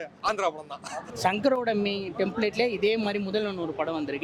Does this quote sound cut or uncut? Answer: cut